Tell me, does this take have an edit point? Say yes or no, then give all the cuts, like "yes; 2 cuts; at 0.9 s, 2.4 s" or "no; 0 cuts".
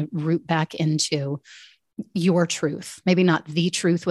no; 0 cuts